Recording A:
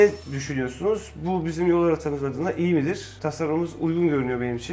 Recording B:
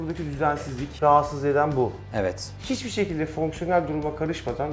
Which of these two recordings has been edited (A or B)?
B